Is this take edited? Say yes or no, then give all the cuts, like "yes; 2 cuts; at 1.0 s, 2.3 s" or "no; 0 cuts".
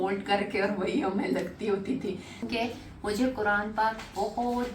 yes; 1 cut; at 2.3 s